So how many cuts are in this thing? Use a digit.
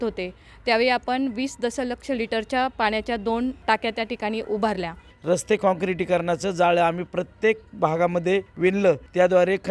3